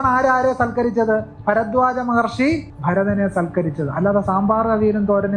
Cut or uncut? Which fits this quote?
cut